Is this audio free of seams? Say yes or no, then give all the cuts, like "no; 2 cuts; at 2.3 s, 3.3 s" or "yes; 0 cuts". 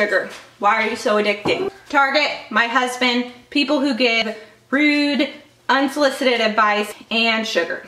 no; 3 cuts; at 1.7 s, 4.2 s, 6.9 s